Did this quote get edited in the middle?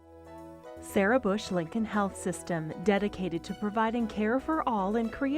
yes; 1 cut; at 0.9 s

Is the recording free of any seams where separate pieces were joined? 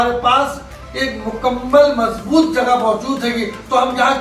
yes; 0 cuts

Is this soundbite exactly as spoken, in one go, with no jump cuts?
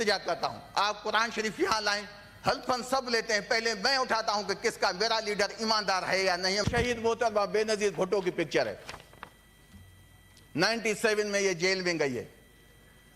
no; 1 cut; at 6.6 s

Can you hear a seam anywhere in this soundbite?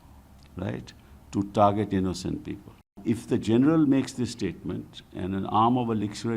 yes; 1 cut; at 3.0 s

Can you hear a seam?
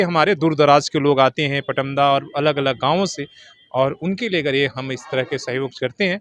no; 0 cuts

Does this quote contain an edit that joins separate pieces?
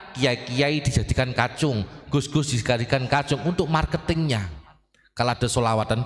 no; 0 cuts

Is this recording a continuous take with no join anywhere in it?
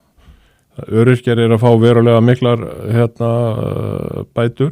yes; 0 cuts

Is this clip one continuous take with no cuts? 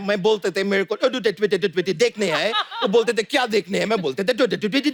yes; 0 cuts

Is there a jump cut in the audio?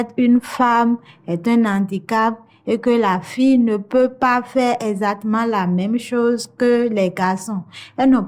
no; 0 cuts

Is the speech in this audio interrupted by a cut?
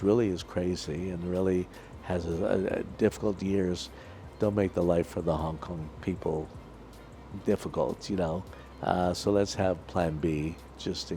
no; 0 cuts

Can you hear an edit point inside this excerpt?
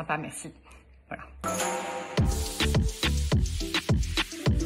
yes; 1 cut; at 1.3 s

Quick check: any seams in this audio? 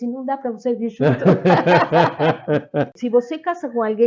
yes; 1 cut; at 3.0 s

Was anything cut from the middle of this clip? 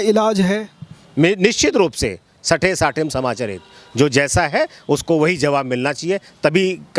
no; 0 cuts

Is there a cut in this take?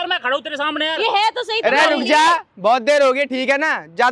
no; 0 cuts

